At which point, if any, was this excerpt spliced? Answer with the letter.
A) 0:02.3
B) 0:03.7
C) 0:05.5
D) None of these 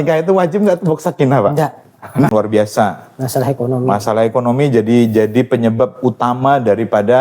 A